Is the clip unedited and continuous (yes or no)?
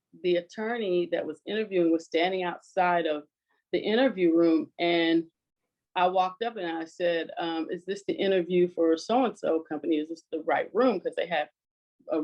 yes